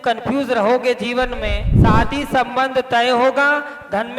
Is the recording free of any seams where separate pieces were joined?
no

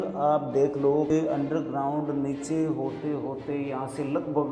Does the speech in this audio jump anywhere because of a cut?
yes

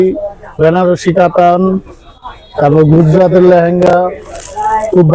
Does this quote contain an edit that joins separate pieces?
no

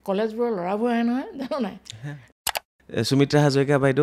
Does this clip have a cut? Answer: yes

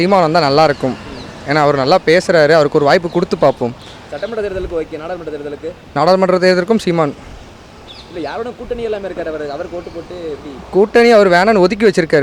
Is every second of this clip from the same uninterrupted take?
yes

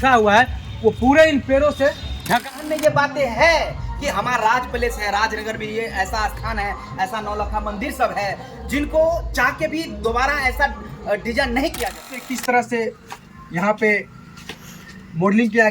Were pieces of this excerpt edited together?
yes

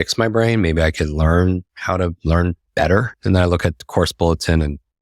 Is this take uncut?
no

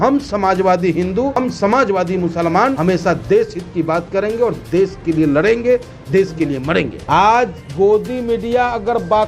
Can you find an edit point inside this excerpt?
yes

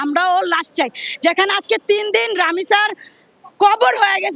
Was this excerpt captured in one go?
yes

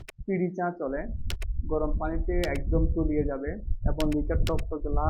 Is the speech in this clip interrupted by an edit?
no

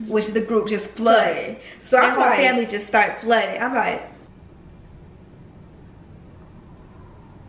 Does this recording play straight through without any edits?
yes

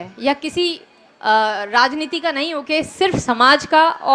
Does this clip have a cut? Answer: no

